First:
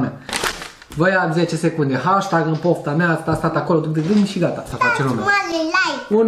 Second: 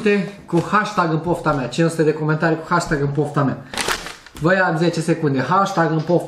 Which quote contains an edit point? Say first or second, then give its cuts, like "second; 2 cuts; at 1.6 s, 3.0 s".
first; 1 cut; at 4.7 s